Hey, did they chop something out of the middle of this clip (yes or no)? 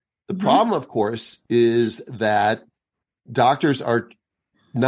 yes